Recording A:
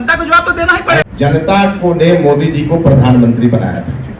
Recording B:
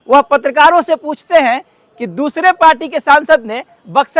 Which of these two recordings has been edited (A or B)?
A